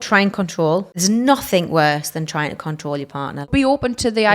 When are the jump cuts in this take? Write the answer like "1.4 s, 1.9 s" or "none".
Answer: 0.9 s, 3.5 s